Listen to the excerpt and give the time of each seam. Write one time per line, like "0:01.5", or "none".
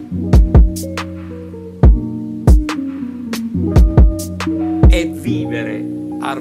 0:05.0